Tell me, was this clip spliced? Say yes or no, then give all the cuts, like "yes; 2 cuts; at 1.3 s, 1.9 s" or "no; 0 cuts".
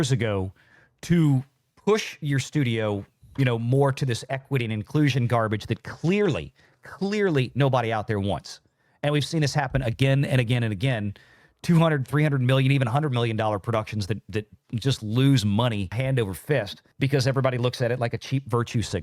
no; 0 cuts